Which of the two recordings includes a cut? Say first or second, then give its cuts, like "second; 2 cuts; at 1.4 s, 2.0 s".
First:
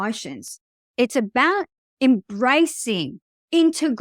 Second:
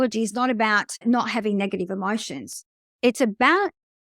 second; 1 cut; at 1.0 s